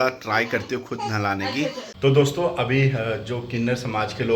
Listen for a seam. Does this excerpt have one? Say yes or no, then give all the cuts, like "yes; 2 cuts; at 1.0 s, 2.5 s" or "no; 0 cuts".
yes; 1 cut; at 1.9 s